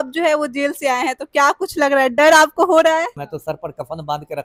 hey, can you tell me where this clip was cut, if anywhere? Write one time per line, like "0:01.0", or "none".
0:03.2